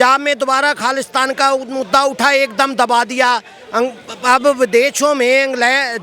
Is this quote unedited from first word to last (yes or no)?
yes